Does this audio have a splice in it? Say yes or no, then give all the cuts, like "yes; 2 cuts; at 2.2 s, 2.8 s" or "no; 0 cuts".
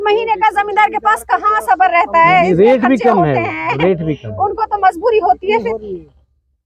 no; 0 cuts